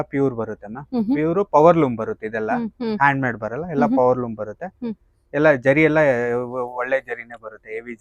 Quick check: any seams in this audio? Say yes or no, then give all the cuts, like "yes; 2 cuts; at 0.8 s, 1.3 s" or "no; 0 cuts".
no; 0 cuts